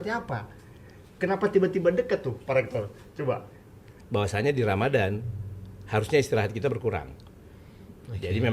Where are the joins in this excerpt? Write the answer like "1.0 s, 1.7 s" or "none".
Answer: 3.9 s